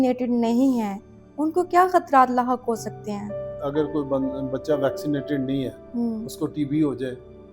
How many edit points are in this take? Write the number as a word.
one